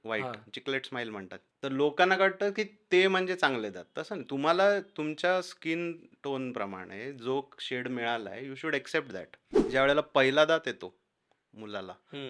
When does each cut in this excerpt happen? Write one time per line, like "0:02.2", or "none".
0:01.4
0:09.7